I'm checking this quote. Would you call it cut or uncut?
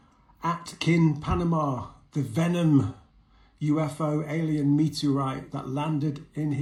uncut